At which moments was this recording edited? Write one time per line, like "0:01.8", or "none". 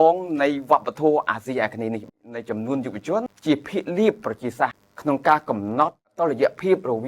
0:02.3
0:03.3
0:04.9
0:06.1